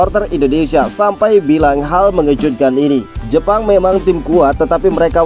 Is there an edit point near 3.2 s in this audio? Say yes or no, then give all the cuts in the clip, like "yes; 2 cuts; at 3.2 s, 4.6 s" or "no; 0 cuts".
yes; 1 cut; at 3.2 s